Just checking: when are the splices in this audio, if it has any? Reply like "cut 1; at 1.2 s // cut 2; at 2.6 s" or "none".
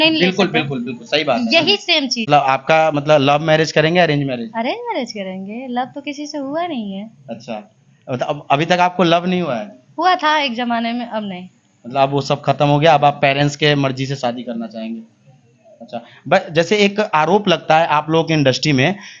cut 1; at 2.3 s

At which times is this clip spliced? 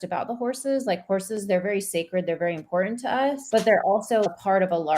cut 1; at 3.4 s // cut 2; at 4.3 s

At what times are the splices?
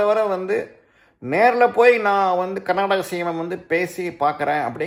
none

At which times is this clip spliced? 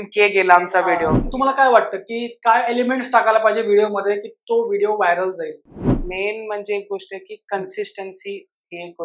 cut 1; at 1.2 s // cut 2; at 5.9 s

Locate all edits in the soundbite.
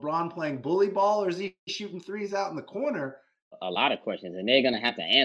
cut 1; at 3.6 s

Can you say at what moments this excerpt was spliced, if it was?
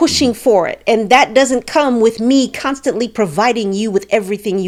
none

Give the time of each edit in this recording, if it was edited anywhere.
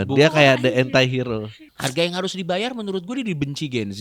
cut 1; at 1.6 s

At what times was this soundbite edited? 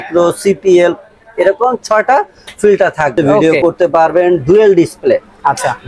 cut 1; at 3.3 s

